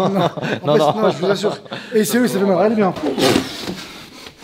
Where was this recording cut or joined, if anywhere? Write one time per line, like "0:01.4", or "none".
0:03.0